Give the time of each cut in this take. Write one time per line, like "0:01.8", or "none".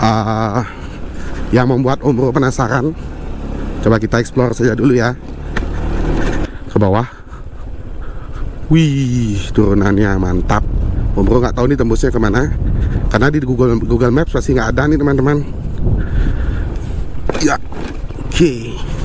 0:06.4